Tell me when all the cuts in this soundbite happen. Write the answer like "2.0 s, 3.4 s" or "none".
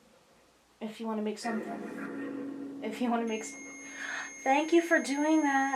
none